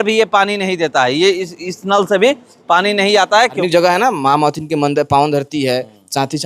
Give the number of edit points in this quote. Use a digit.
1